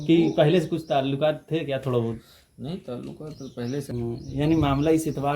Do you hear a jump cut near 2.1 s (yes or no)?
no